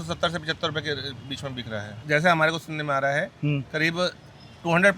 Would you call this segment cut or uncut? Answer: cut